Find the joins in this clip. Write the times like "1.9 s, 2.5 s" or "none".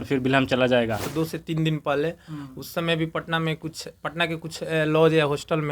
1.1 s

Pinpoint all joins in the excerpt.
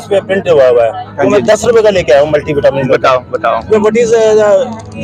none

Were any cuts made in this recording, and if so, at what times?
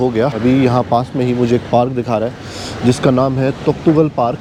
none

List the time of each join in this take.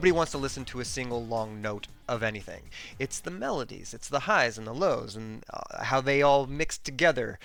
none

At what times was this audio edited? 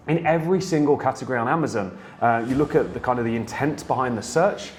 none

